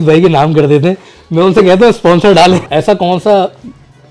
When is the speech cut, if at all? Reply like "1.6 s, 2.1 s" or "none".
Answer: 2.6 s